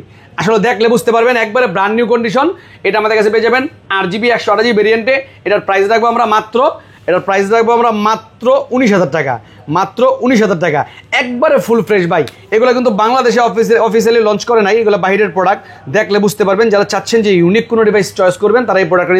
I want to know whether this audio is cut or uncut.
uncut